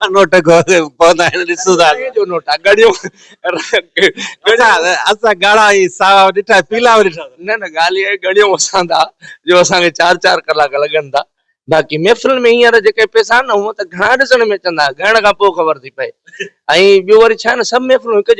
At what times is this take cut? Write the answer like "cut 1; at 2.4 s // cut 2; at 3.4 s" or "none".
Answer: none